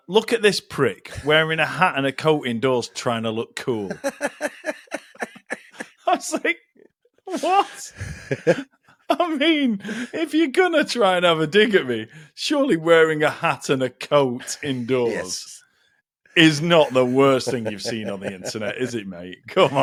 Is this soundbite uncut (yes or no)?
yes